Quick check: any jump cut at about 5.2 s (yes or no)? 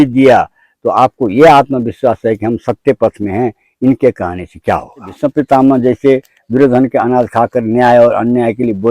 yes